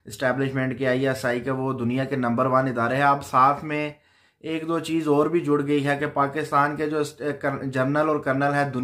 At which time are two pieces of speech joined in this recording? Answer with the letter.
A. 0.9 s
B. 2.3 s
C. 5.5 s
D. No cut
D